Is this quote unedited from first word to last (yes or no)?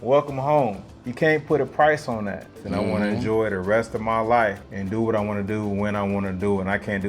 no